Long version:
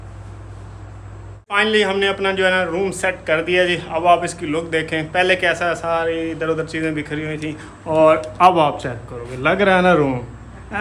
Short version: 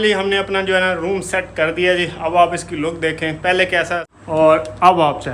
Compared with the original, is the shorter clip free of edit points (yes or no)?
no